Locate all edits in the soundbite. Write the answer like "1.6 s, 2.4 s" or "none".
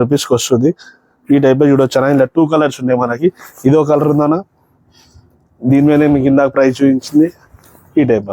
none